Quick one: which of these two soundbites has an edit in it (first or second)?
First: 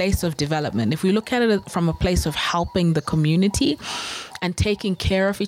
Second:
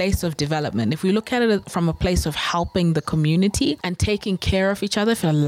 second